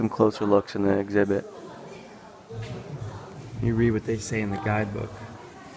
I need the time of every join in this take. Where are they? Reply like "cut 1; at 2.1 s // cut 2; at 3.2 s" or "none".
cut 1; at 1.9 s

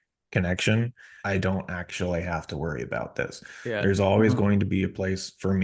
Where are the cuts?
cut 1; at 1.1 s

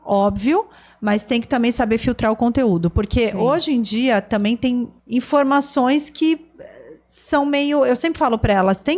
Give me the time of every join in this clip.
cut 1; at 5.0 s

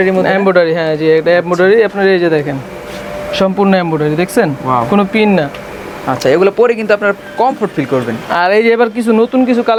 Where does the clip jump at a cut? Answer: none

